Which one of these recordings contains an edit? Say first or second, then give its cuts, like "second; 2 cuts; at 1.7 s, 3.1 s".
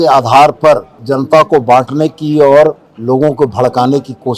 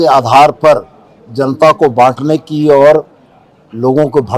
first; 2 cuts; at 1.0 s, 2.9 s